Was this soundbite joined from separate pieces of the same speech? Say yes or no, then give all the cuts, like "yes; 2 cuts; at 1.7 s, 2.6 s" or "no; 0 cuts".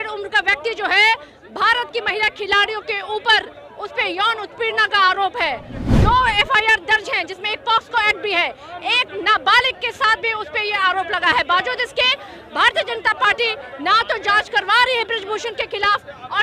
no; 0 cuts